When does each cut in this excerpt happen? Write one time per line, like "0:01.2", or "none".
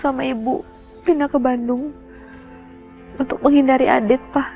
none